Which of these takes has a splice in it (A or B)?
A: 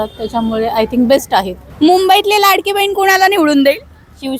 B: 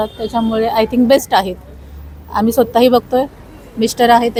A